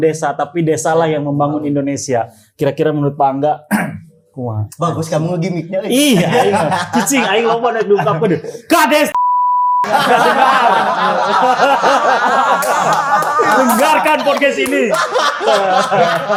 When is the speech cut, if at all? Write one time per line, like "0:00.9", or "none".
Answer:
none